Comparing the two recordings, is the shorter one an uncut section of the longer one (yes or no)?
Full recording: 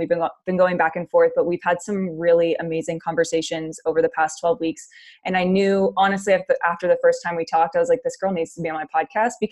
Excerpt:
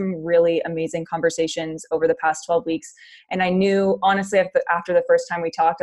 yes